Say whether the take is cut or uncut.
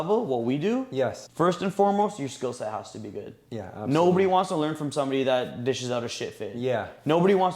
cut